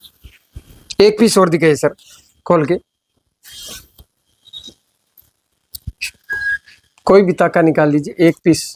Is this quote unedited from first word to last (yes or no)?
yes